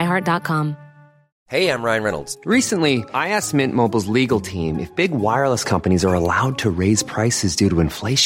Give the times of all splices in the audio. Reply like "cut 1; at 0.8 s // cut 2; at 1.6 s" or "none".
cut 1; at 1.3 s